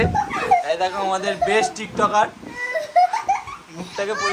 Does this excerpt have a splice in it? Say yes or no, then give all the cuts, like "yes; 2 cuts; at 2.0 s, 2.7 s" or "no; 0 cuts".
no; 0 cuts